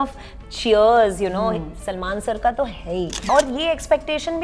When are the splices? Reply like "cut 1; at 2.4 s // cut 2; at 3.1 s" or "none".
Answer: cut 1; at 3.2 s